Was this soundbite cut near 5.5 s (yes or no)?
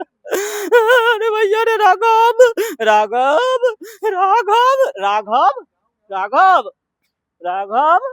no